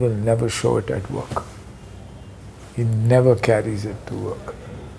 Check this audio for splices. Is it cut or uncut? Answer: uncut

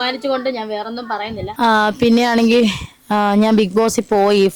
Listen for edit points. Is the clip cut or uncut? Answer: cut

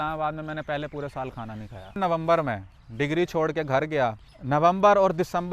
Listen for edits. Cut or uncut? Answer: cut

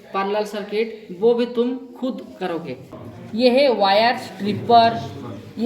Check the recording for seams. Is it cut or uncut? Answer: cut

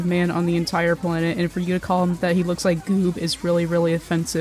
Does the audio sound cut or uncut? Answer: uncut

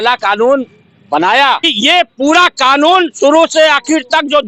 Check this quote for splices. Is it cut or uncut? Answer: cut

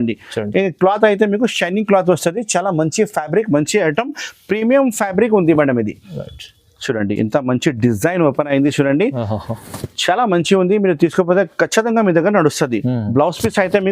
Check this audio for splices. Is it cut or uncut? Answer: uncut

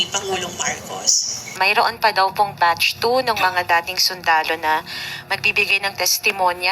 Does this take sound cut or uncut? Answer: cut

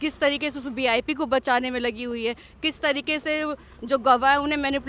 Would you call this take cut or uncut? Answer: uncut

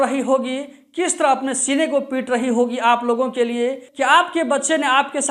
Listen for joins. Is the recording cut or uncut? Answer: cut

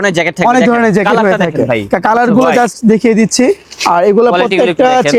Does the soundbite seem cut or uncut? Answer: uncut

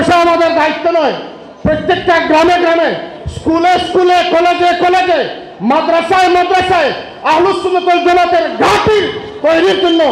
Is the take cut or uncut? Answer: uncut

